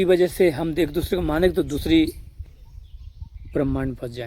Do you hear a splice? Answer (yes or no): yes